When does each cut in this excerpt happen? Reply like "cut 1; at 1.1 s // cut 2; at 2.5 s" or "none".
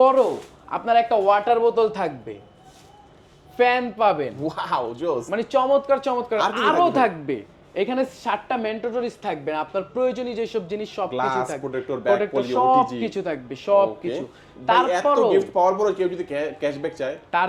none